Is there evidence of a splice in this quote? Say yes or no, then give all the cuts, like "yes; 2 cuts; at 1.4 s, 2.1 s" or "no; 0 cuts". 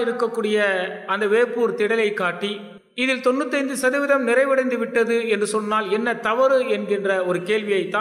no; 0 cuts